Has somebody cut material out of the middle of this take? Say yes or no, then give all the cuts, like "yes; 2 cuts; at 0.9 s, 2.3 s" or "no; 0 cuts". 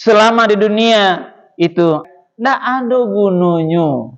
yes; 1 cut; at 2.0 s